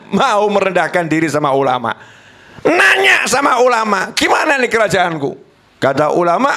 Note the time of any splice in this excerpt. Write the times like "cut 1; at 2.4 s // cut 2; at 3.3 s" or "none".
none